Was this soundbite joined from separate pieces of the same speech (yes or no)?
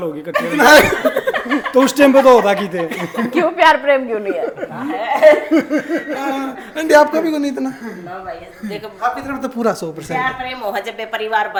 no